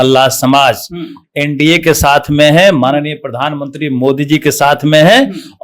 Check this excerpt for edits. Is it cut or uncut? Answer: uncut